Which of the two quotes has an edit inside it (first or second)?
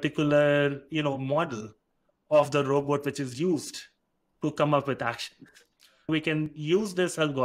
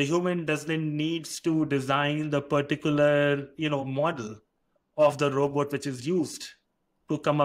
first